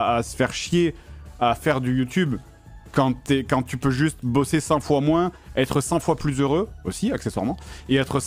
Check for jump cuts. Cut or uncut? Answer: uncut